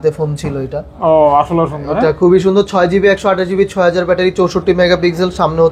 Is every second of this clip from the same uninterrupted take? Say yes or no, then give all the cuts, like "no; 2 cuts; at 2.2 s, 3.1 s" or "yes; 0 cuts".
yes; 0 cuts